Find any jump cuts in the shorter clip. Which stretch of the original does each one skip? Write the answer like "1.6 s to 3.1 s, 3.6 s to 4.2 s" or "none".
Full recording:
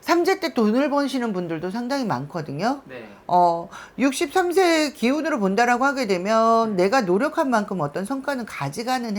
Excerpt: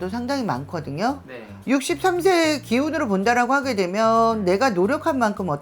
3.1 s to 3.8 s